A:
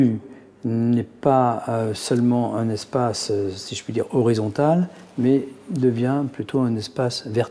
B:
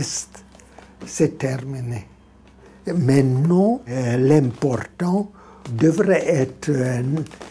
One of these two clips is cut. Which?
B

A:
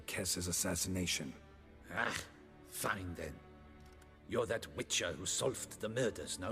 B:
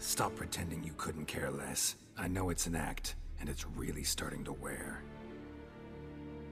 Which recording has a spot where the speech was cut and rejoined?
A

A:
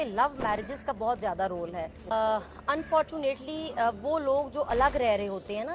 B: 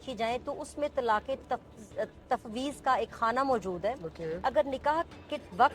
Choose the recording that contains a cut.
A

